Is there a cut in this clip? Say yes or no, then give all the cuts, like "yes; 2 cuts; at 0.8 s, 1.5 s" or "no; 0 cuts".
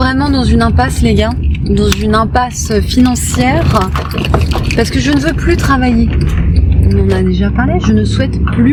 no; 0 cuts